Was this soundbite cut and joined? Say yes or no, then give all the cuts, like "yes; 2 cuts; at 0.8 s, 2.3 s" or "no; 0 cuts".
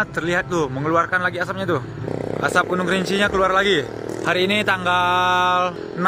yes; 1 cut; at 4.0 s